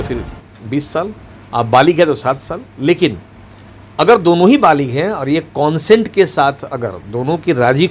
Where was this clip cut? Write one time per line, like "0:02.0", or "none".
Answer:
none